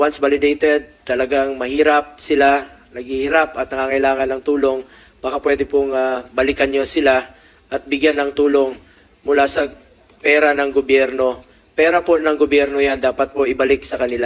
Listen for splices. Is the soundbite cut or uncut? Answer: uncut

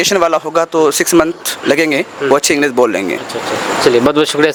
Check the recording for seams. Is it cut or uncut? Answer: uncut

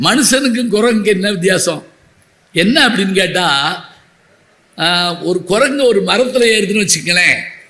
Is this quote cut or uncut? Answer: uncut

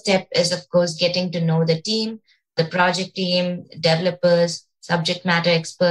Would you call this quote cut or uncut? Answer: cut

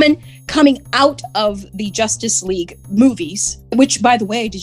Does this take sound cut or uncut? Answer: cut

